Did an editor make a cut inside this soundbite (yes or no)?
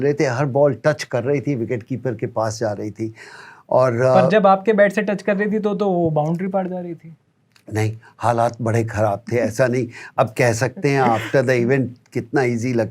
no